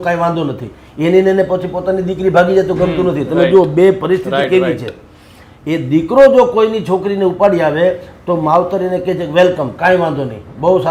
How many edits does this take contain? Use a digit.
0